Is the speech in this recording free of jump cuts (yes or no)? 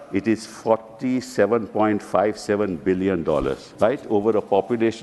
no